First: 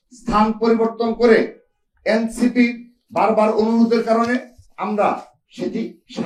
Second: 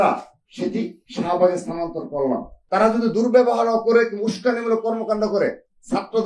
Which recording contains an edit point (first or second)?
second